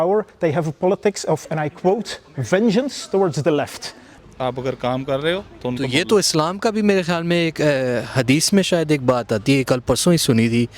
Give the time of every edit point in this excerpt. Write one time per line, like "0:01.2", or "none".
0:04.2